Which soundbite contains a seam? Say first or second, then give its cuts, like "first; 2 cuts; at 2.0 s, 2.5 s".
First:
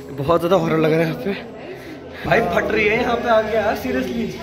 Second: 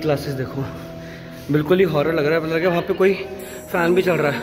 first; 1 cut; at 2.2 s